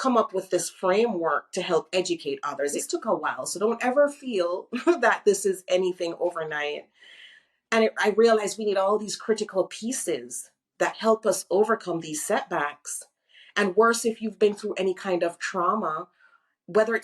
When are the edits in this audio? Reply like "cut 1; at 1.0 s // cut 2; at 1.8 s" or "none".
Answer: cut 1; at 2.7 s